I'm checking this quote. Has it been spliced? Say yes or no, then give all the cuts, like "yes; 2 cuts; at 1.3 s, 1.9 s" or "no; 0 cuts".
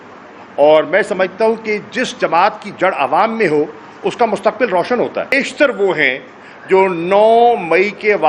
yes; 1 cut; at 5.3 s